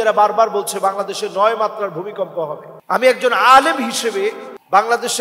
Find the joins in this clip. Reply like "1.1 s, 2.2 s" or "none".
none